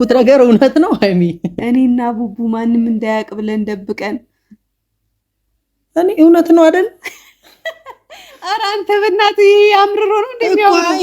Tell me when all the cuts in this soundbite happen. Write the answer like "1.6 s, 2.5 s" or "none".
1.5 s